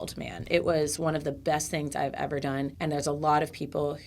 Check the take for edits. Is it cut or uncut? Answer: cut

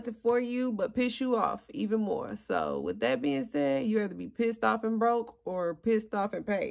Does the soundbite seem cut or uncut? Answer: uncut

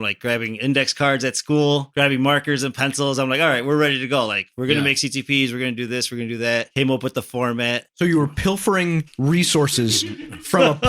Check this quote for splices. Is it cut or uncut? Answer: cut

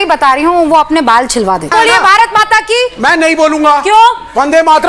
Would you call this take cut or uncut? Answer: cut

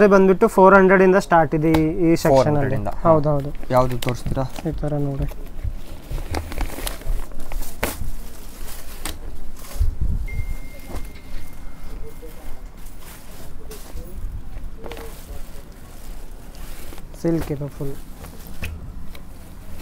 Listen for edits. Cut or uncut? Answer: uncut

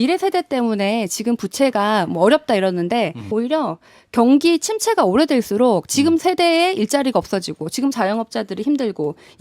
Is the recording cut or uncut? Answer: cut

